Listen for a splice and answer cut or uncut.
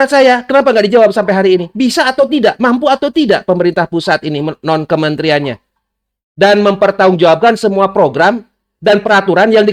uncut